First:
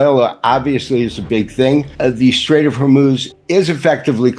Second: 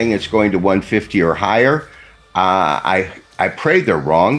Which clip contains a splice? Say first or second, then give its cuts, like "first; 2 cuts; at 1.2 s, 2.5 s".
first; 2 cuts; at 1.9 s, 3.3 s